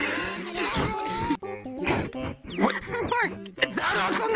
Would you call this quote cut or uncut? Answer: cut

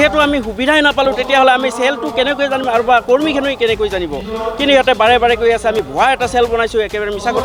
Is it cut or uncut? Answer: uncut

